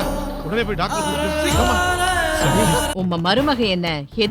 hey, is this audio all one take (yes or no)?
no